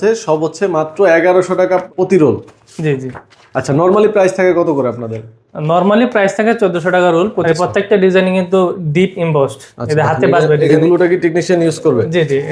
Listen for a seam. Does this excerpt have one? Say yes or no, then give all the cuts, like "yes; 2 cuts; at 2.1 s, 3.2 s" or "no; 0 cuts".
yes; 3 cuts; at 1.9 s, 7.4 s, 10.7 s